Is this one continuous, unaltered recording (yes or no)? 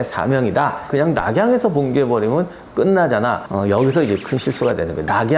no